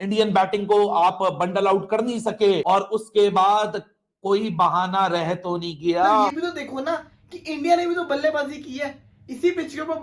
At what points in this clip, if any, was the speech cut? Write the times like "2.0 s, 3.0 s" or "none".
6.3 s